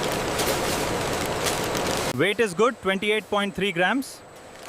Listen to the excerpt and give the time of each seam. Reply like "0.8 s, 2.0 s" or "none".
2.1 s